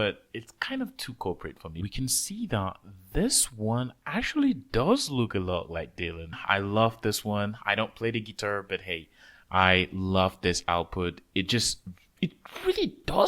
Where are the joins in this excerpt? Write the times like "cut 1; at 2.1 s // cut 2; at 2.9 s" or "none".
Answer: cut 1; at 1.8 s // cut 2; at 6.4 s